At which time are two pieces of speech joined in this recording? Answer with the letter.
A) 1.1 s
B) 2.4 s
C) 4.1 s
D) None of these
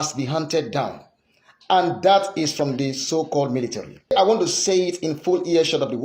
C